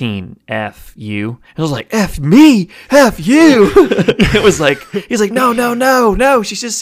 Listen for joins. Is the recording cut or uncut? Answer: cut